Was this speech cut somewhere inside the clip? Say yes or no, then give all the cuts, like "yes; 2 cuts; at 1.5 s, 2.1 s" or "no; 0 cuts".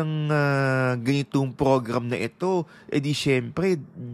no; 0 cuts